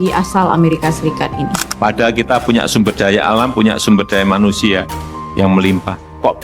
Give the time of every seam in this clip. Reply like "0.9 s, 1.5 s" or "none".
1.5 s